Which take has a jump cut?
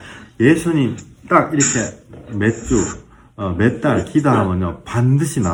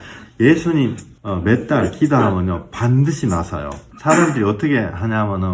second; 2 cuts; at 1.1 s, 3.8 s

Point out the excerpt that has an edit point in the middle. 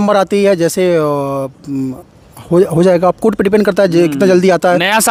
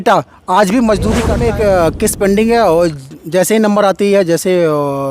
second; 1 cut; at 1.3 s

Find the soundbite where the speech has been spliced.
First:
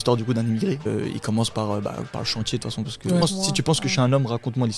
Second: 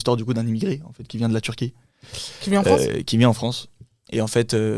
first; 2 cuts; at 0.9 s, 3.2 s

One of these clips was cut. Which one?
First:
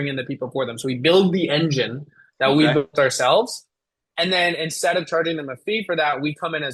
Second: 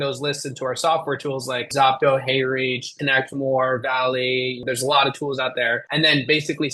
second; 4 cuts; at 1.7 s, 2.9 s, 4.6 s, 5.8 s

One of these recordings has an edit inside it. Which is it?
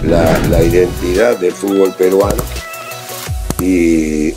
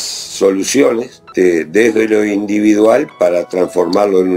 second; 1 cut; at 1.3 s

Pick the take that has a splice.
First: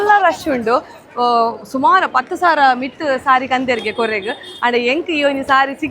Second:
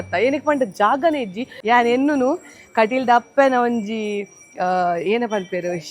second; 1 cut; at 1.5 s

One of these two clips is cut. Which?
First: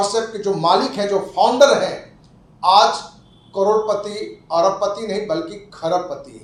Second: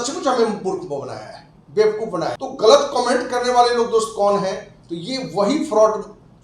second; 1 cut; at 2.4 s

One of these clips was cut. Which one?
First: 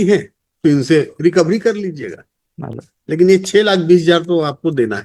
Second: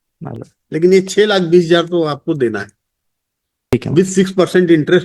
second; 1 cut; at 3.7 s

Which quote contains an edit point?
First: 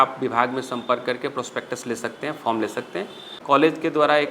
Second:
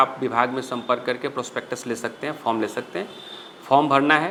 first; 1 cut; at 3.4 s

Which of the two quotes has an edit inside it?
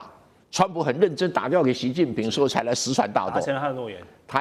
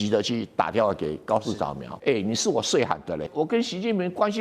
second; 2 cuts; at 1.9 s, 3.3 s

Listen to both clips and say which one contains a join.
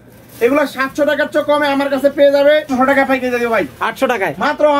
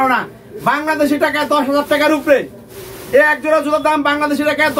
first; 1 cut; at 2.7 s

